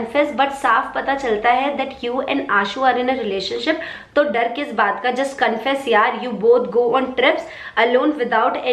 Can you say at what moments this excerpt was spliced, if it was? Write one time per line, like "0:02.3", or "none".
none